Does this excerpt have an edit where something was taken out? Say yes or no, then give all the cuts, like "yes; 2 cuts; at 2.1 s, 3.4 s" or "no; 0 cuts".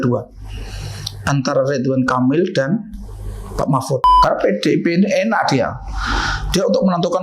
yes; 1 cut; at 4.0 s